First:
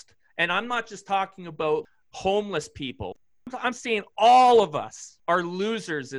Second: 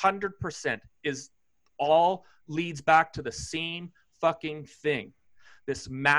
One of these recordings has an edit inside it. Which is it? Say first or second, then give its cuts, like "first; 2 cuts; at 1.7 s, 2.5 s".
first; 3 cuts; at 1.8 s, 3.2 s, 5.0 s